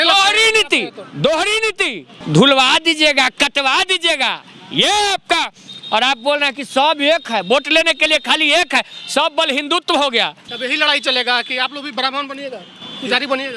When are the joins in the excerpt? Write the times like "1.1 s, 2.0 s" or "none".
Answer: 2.1 s, 10.5 s

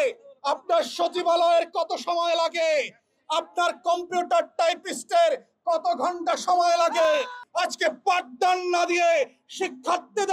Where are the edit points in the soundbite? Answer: 7.3 s

